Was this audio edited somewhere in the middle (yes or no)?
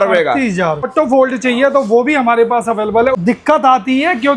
yes